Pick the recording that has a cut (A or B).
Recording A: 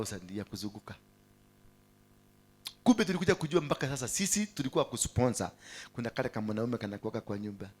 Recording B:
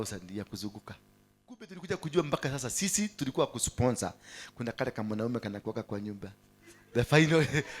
B